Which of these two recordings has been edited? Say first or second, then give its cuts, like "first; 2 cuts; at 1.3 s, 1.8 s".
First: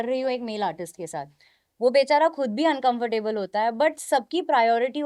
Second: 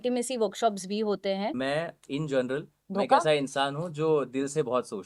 second; 1 cut; at 1.5 s